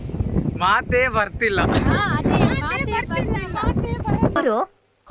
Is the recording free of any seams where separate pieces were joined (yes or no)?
no